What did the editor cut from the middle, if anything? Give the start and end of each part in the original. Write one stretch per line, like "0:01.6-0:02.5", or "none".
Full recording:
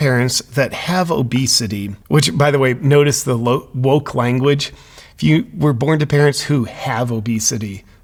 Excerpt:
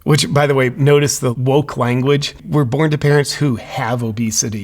0:03.4-0:03.7
0:04.8-0:05.5